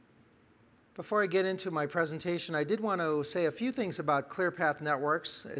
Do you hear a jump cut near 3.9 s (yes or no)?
yes